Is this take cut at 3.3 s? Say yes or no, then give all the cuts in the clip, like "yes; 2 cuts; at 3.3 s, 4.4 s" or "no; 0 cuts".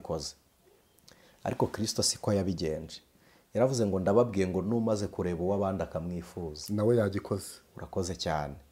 no; 0 cuts